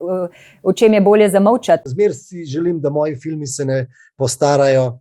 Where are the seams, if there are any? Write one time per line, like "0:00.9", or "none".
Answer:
0:01.9